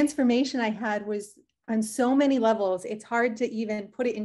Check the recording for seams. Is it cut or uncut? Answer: uncut